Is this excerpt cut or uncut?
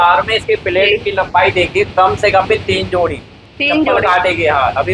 uncut